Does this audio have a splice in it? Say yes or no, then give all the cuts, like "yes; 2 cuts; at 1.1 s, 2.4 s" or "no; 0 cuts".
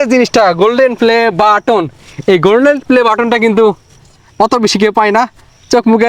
no; 0 cuts